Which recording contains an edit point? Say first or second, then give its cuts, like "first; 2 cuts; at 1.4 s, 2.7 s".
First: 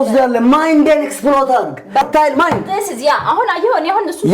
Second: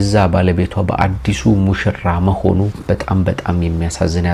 first; 1 cut; at 2.0 s